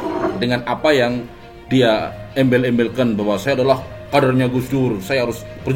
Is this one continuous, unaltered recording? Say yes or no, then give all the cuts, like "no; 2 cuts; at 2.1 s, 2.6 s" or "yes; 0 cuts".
yes; 0 cuts